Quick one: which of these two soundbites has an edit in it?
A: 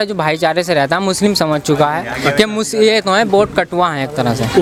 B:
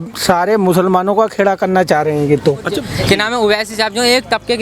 B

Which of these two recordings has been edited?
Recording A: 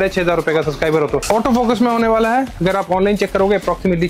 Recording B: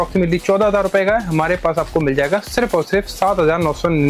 A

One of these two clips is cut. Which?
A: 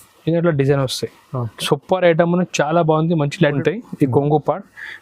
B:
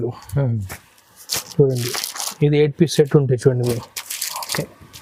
A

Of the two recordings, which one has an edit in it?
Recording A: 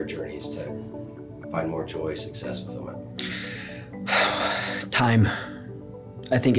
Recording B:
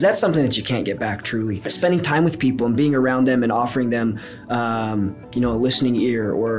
B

